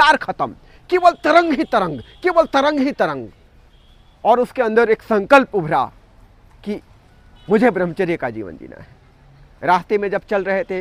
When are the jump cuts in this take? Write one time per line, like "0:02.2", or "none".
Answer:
none